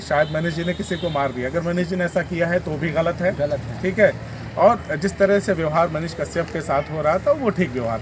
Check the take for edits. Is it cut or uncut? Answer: uncut